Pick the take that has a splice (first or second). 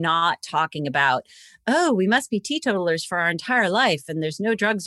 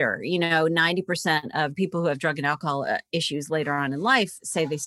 second